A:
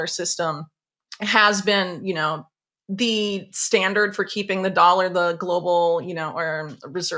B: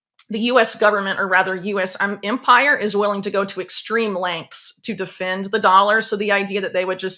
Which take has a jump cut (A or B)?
B